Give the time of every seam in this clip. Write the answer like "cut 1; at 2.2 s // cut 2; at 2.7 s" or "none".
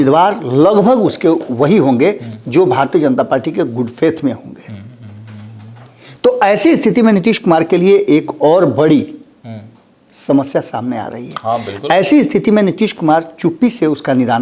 none